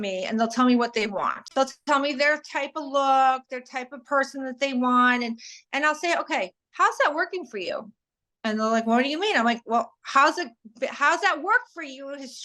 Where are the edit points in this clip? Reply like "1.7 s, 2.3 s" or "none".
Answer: 1.4 s